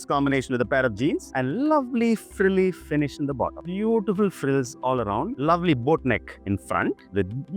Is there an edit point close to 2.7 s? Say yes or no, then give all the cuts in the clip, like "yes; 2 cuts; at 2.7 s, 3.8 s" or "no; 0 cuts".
no; 2 cuts; at 1.3 s, 5.3 s